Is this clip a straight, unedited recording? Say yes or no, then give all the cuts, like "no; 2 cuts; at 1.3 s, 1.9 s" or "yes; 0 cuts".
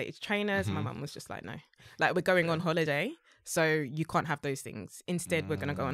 yes; 0 cuts